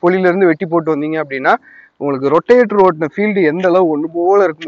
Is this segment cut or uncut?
uncut